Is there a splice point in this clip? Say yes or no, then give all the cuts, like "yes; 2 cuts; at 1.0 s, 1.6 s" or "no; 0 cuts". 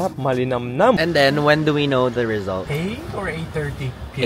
yes; 1 cut; at 1.0 s